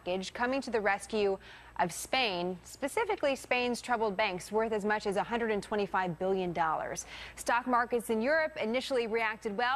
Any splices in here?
no; 0 cuts

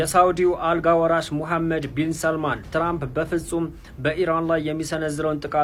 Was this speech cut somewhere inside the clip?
no; 0 cuts

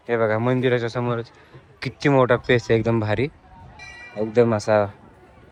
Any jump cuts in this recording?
no; 0 cuts

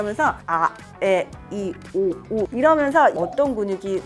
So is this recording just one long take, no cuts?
yes; 0 cuts

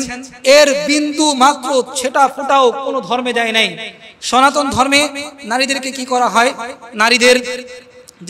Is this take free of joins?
yes; 0 cuts

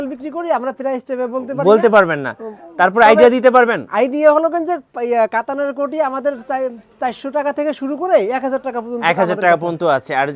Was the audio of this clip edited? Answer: no; 0 cuts

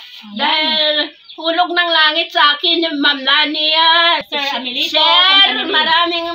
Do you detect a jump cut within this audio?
yes; 1 cut; at 4.3 s

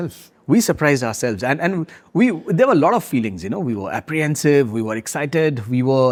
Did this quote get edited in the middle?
no; 0 cuts

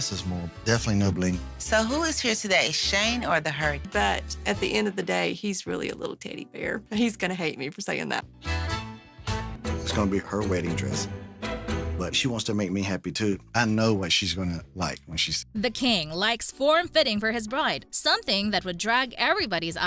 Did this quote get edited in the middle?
no; 0 cuts

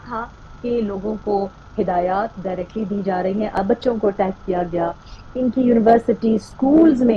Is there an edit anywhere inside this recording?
yes; 1 cut; at 3.6 s

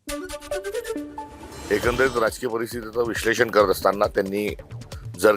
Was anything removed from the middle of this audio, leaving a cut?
yes; 1 cut; at 1.6 s

